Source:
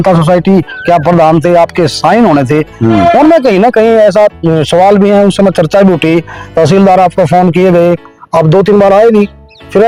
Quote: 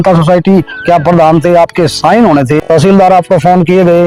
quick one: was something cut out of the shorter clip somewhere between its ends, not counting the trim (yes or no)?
yes